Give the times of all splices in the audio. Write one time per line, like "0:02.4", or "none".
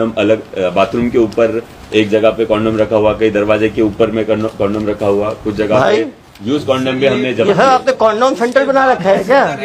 none